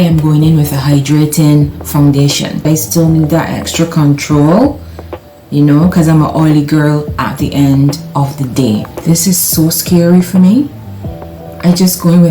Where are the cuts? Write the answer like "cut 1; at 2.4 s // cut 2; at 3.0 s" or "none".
cut 1; at 2.6 s // cut 2; at 8.9 s